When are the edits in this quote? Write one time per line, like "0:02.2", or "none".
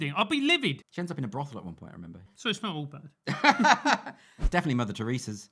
0:00.9
0:02.3
0:04.3